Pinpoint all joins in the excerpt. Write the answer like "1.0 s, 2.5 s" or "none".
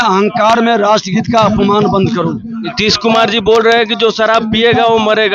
2.5 s